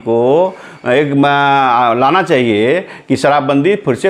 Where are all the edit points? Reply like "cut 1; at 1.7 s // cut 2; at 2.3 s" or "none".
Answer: none